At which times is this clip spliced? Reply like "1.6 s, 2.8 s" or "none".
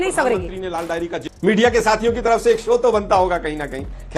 1.2 s